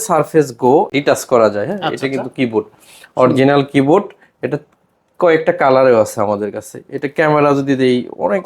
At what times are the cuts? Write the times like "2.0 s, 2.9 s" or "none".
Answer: 0.9 s